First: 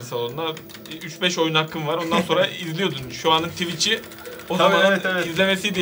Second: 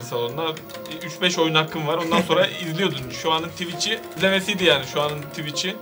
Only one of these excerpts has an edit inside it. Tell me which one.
second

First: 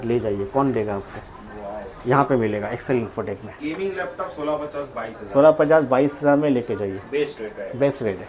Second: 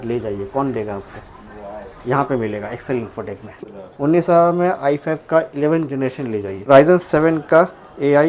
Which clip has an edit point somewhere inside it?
second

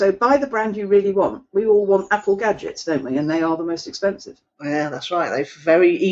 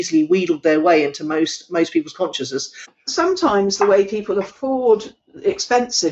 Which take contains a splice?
second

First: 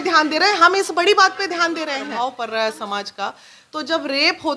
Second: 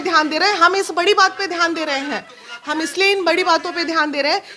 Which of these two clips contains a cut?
first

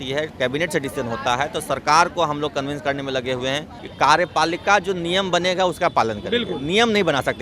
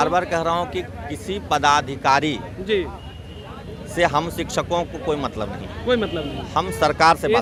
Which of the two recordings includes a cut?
first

